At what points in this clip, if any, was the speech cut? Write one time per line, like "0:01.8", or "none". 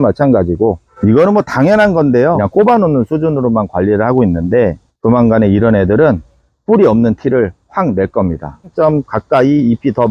0:02.4
0:08.7